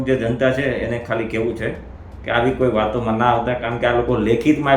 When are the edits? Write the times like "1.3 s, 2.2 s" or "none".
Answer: none